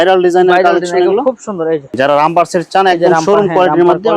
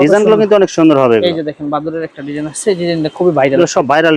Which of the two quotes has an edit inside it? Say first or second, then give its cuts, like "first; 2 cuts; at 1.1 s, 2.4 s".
first; 1 cut; at 1.9 s